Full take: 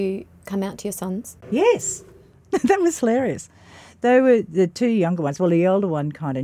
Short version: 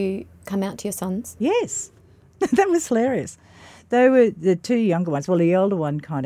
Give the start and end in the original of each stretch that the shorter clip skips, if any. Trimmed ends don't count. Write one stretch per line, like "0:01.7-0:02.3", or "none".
0:01.3-0:01.4